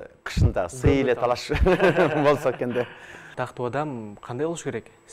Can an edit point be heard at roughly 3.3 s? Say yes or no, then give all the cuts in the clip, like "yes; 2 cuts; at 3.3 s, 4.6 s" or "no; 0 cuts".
yes; 1 cut; at 3.3 s